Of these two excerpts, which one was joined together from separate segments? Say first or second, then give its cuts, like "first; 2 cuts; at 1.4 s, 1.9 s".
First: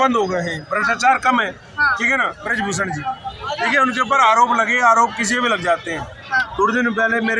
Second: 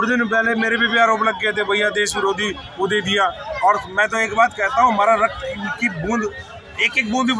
first; 1 cut; at 2.4 s